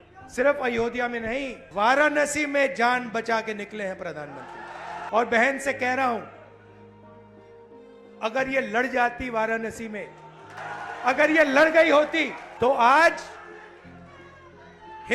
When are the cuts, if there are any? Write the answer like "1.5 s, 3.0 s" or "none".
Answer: 1.6 s, 5.0 s, 10.6 s, 12.4 s